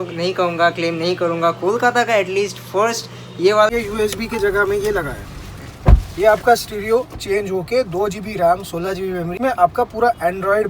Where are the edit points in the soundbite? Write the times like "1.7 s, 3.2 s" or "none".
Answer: 3.7 s, 9.3 s